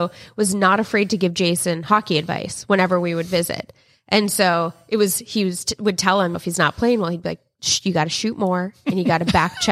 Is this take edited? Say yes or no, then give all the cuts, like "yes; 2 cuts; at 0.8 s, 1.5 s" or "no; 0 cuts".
no; 0 cuts